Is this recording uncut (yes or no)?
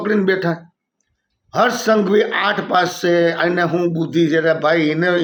yes